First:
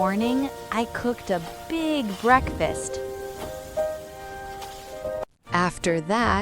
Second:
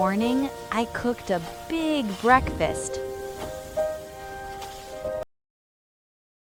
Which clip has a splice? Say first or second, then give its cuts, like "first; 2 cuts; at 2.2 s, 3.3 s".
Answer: first; 1 cut; at 5.2 s